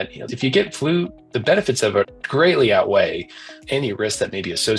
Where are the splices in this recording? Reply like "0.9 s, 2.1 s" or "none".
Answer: 2.2 s